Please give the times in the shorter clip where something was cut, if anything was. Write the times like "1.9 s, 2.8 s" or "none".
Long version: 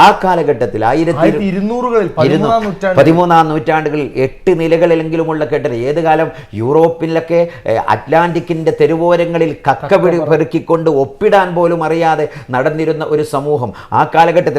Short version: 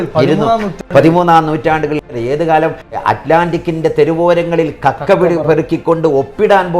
2.1 s, 3.0 s